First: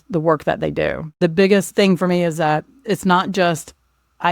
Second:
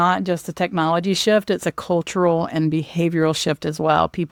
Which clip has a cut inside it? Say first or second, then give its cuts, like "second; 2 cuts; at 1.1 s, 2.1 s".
first; 3 cuts; at 1.0 s, 1.7 s, 2.8 s